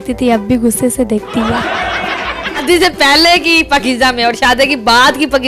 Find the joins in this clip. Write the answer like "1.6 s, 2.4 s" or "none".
2.6 s